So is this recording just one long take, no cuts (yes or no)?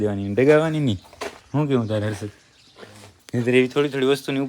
yes